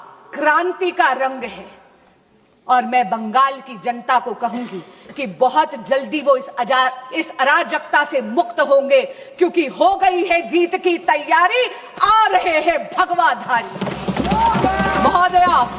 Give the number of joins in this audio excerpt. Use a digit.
0